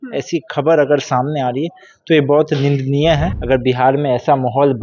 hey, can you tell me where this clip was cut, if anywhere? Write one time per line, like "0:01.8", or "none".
0:03.3